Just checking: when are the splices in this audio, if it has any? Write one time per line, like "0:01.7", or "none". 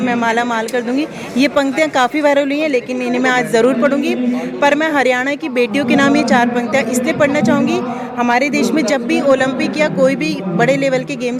none

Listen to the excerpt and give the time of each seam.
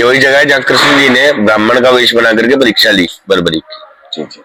none

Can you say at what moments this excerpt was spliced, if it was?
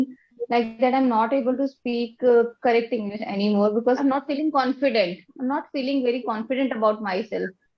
0:04.0

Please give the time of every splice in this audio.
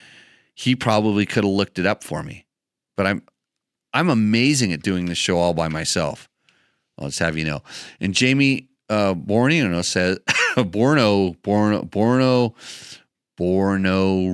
none

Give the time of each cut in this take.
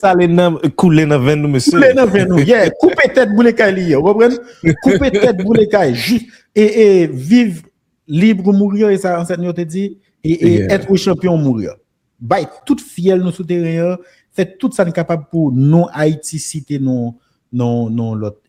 none

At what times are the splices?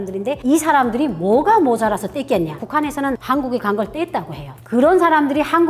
0:02.6
0:04.6

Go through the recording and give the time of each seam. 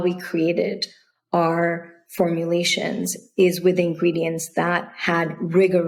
none

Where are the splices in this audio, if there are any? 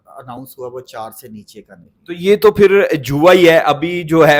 none

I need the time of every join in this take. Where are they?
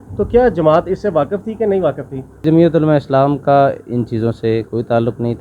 0:02.4

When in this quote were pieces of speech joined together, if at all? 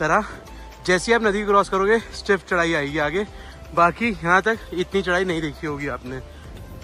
none

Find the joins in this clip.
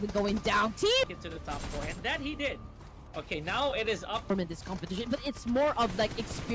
0:01.1
0:04.3

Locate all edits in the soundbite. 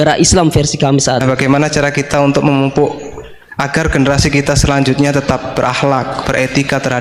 0:01.2

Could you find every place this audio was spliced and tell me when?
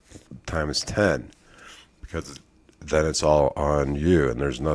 none

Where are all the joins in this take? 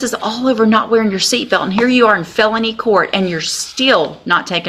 none

